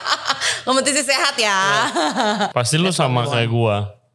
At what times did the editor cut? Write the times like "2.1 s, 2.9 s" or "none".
2.5 s